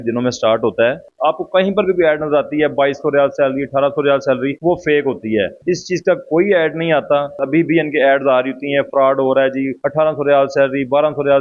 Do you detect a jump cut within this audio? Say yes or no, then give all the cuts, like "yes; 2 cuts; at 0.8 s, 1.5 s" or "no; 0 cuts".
yes; 2 cuts; at 1.0 s, 7.4 s